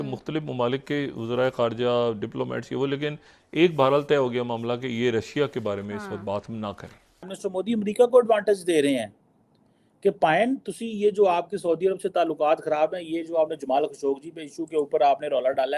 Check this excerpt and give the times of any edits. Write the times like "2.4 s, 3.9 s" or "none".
7.3 s